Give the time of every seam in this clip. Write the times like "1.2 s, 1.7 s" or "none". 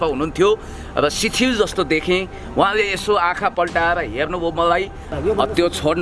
5.1 s